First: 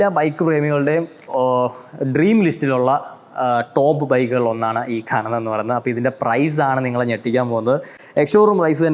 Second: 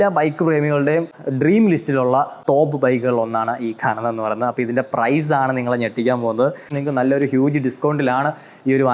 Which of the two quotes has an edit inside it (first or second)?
second